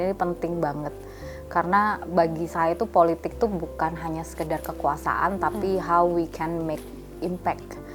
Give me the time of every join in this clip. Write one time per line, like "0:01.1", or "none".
none

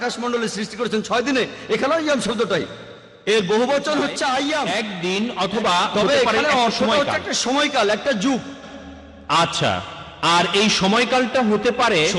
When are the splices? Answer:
0:04.8

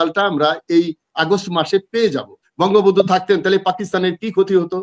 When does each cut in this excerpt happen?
0:02.5

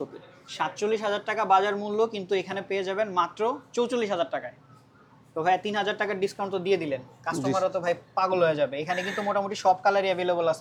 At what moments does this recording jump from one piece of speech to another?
none

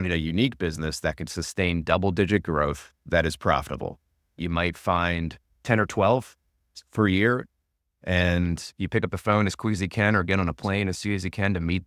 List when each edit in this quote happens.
0:04.4

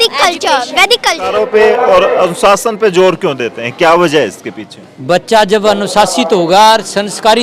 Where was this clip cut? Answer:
0:01.3

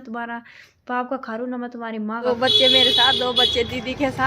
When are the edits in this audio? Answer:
0:02.3

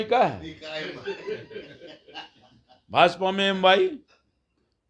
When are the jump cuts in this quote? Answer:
none

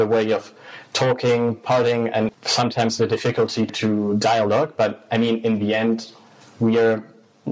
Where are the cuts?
0:02.3
0:03.7

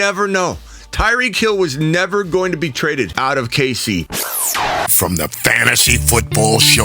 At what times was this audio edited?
0:04.1

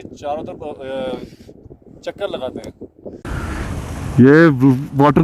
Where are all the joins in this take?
0:03.3

